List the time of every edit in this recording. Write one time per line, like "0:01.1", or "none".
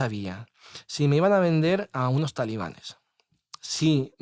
none

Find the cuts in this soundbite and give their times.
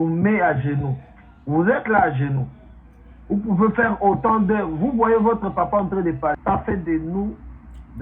0:06.4

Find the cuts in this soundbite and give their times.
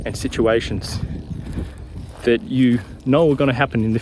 0:02.9

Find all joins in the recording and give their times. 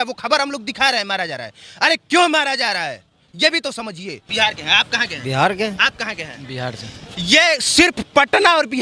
0:04.2

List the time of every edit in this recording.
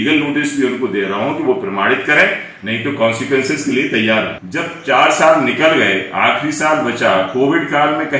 0:04.4

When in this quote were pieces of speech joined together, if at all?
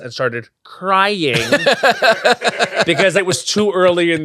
0:03.2

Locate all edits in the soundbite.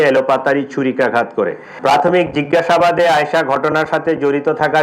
0:01.7

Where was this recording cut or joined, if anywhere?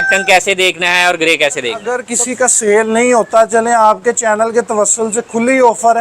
0:02.0

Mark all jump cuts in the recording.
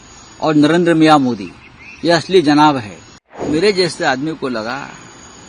0:03.4

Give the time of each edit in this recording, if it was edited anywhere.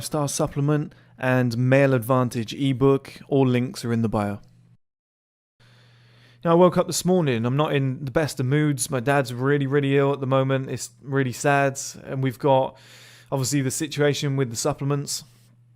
0:05.6

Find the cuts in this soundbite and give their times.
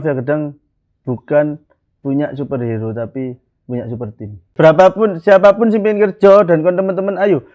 0:04.4

